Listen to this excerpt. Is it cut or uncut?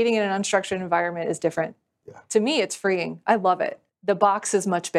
cut